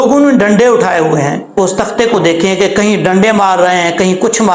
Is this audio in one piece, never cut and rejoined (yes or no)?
no